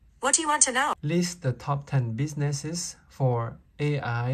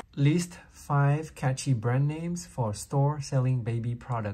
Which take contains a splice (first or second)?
first